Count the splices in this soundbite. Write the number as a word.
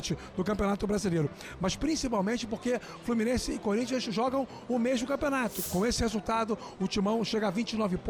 one